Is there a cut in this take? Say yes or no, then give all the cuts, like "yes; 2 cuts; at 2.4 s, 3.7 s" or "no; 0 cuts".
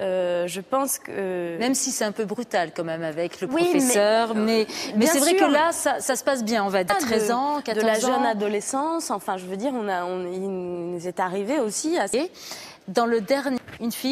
yes; 1 cut; at 6.5 s